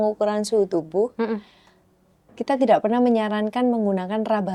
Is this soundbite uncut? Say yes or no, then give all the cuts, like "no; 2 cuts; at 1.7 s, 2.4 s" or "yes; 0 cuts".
yes; 0 cuts